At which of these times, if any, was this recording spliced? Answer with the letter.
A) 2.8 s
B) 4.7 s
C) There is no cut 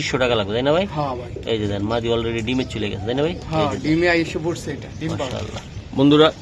C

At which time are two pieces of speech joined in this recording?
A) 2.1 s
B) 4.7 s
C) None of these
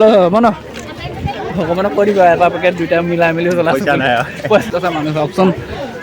B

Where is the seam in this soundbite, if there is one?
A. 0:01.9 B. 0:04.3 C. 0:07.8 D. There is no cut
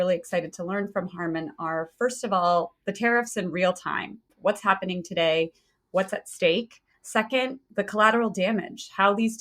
B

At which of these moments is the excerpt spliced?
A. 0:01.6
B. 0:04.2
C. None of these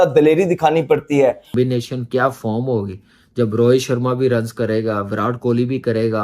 A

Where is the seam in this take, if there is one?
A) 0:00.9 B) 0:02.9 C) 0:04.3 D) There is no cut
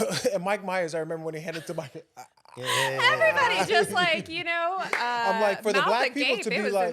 D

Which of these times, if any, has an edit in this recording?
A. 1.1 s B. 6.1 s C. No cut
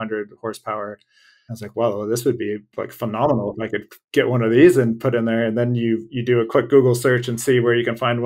C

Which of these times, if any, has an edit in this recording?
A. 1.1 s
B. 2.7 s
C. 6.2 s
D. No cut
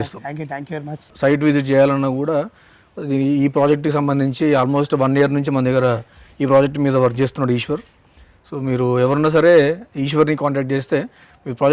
A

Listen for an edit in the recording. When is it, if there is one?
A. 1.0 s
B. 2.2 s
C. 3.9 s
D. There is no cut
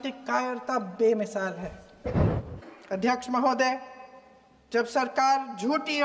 B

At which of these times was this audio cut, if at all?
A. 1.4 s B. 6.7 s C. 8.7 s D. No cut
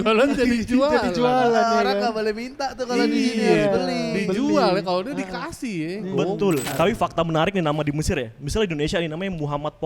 B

